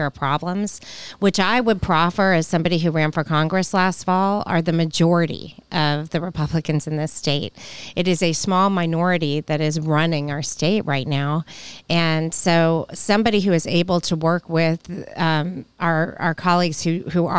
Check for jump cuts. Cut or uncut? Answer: uncut